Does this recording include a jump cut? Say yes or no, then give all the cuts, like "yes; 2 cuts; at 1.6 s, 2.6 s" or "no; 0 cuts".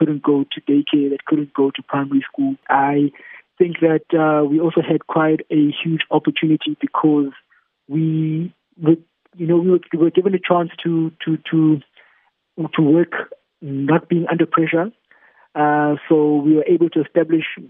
yes; 1 cut; at 2.6 s